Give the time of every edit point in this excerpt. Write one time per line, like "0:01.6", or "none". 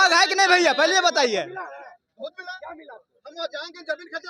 none